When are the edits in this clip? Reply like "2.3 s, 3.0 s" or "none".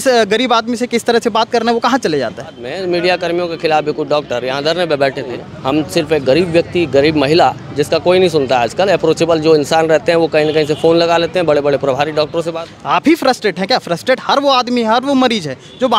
2.7 s, 5.5 s, 12.5 s

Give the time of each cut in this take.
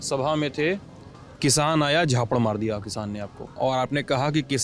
3.4 s

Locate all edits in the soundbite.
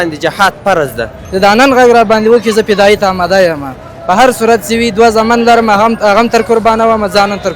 1.2 s

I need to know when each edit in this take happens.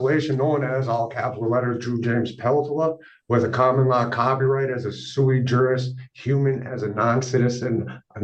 none

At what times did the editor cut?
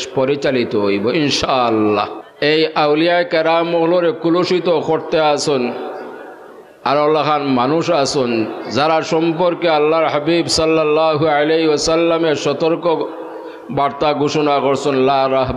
2.2 s

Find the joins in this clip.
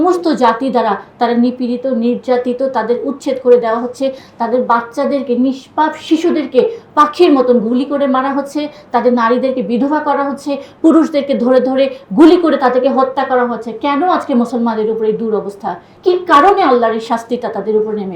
15.9 s

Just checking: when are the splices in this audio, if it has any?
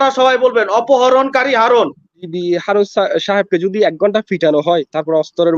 2.2 s

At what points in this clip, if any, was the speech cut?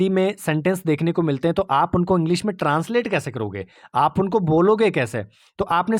none

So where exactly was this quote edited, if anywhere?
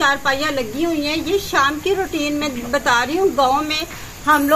none

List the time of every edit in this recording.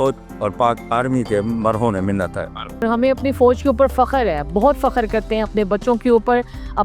2.8 s

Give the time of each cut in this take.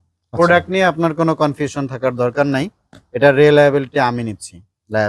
none

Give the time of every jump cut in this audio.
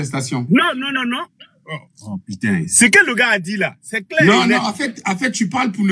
none

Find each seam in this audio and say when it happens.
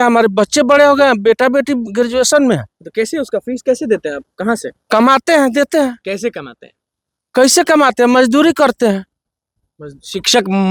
none

